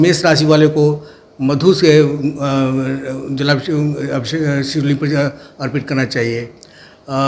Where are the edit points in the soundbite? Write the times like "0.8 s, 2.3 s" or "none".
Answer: none